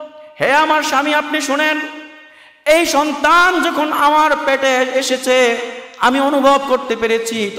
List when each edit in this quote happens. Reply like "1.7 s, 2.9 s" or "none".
none